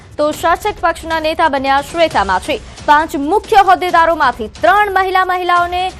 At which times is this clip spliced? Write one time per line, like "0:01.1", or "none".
none

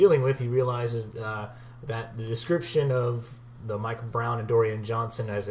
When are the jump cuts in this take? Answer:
0:01.4

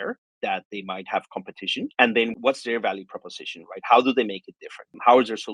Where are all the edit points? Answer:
none

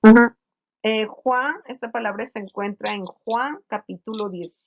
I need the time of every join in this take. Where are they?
0:01.7

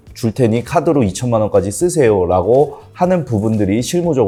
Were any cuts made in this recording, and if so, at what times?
none

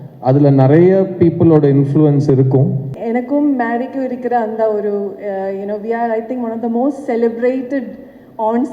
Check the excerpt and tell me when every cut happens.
0:02.9

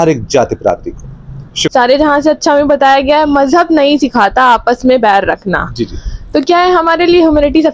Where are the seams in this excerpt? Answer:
0:01.7

